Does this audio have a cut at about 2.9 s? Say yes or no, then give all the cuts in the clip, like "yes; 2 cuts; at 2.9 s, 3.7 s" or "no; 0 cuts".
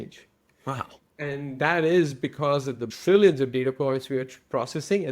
yes; 1 cut; at 2.9 s